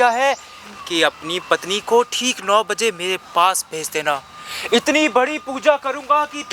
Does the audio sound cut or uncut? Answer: uncut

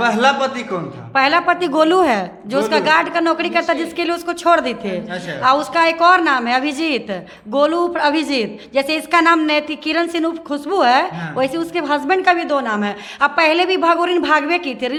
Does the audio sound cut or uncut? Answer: uncut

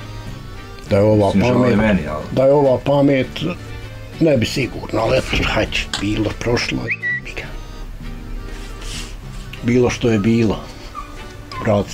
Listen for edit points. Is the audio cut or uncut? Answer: uncut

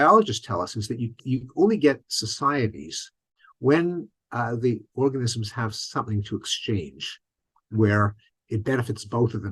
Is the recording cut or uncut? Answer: uncut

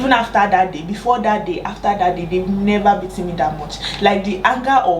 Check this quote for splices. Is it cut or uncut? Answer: uncut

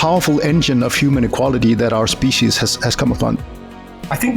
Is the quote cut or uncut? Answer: cut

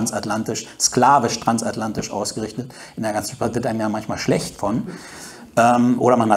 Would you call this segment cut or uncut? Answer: uncut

